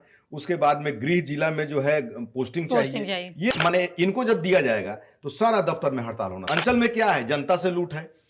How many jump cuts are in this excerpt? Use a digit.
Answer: 2